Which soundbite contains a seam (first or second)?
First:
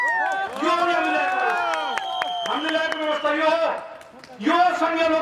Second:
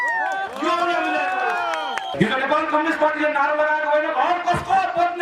second